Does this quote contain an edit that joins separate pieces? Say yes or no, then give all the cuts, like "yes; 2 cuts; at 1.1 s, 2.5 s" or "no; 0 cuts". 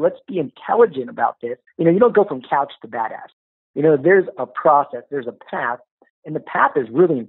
yes; 1 cut; at 1.6 s